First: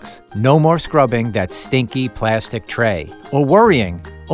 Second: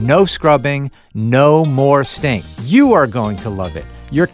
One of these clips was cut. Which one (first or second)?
second